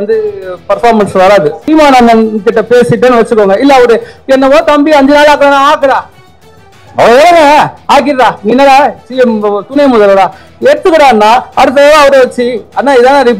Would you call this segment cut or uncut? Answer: cut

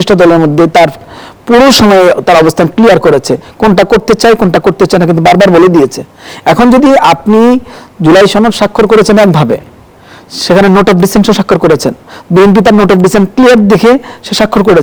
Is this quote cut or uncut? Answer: uncut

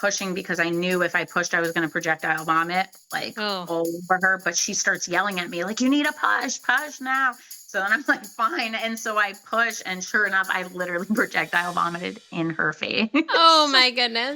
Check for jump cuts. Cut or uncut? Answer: cut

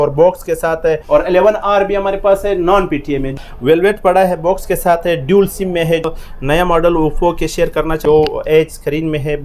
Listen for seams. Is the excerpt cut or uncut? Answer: cut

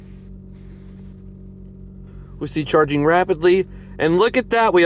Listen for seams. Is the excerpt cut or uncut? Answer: uncut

